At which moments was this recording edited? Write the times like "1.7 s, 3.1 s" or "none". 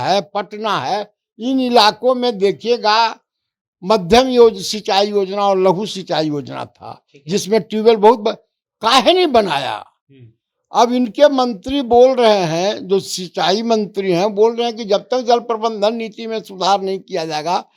none